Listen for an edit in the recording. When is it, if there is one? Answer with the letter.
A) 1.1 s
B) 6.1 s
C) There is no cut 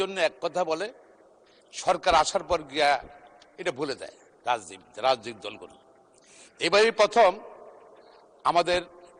C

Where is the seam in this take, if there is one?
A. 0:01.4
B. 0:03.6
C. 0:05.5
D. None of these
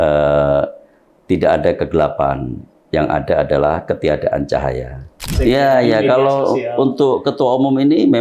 C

